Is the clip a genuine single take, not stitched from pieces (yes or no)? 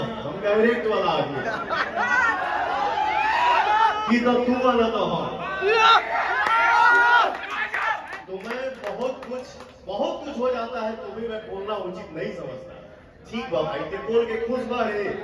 yes